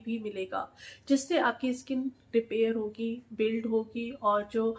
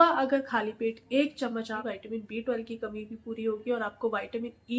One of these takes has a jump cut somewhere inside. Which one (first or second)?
second